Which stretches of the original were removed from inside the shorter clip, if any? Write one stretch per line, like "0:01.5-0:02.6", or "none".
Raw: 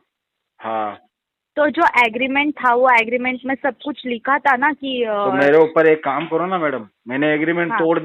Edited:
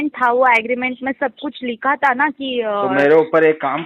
none

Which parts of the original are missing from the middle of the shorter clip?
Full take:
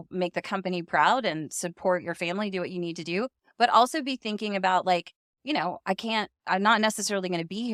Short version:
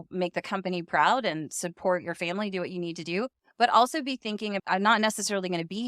0:04.6-0:06.4

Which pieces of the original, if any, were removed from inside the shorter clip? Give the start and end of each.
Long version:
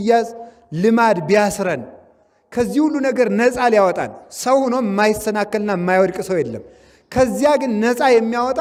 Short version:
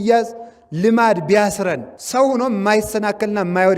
0:01.9-0:04.3

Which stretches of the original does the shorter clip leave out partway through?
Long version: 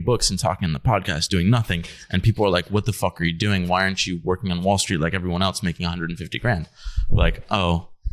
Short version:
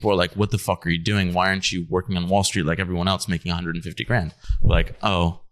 0:06.8-0:06.9

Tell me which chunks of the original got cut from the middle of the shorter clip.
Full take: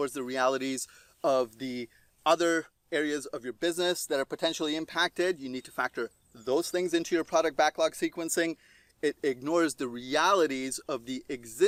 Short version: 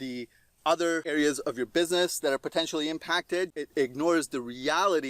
0:02.7-0:02.9
0:05.5-0:09.1

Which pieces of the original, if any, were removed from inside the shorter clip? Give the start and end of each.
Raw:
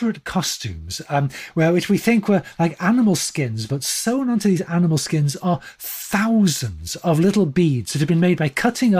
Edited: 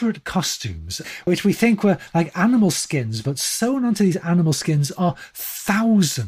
0:01.3-0:01.7

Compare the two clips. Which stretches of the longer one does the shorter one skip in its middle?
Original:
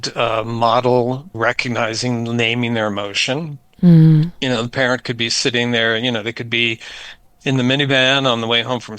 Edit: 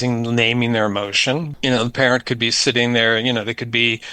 0:03.6-0:04.4

